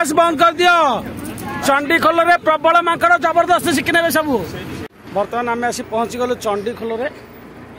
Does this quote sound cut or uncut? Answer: cut